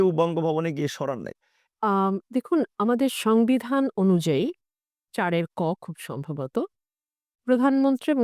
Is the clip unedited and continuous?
no; 1 cut; at 1.6 s

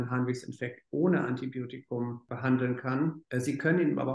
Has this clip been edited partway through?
yes; 2 cuts; at 2.3 s, 3.2 s

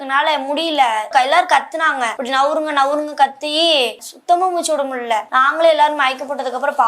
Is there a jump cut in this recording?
yes; 4 cuts; at 1.1 s, 2.2 s, 4.1 s, 5.3 s

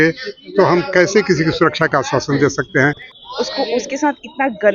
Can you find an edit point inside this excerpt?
yes; 1 cut; at 3.1 s

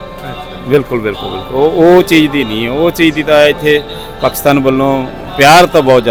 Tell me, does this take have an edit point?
no; 0 cuts

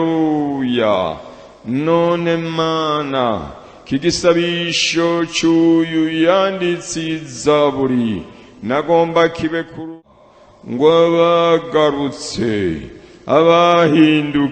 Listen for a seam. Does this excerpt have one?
yes; 1 cut; at 9.9 s

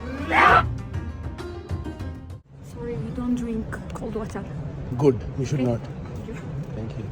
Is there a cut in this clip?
yes; 1 cut; at 2.3 s

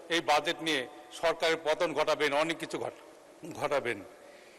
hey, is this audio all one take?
yes; 0 cuts

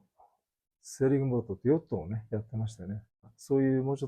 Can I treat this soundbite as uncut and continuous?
no; 1 cut; at 3.2 s

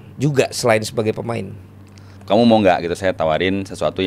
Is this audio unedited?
no; 2 cuts; at 2.2 s, 3.1 s

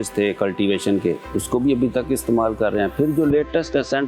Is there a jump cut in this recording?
no; 0 cuts

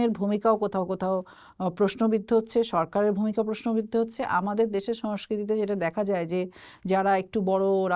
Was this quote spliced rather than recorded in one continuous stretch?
no; 0 cuts

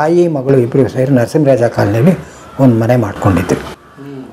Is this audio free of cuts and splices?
yes; 0 cuts

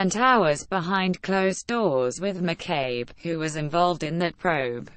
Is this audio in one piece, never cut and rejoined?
no; 1 cut; at 2.4 s

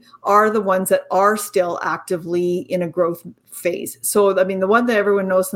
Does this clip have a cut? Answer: no; 0 cuts

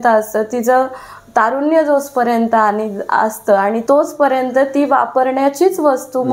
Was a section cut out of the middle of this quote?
yes; 1 cut; at 3.8 s

